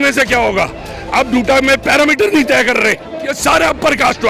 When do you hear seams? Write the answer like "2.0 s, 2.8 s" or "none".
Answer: 3.4 s